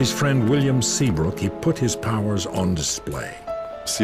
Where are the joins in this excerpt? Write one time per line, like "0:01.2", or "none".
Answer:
none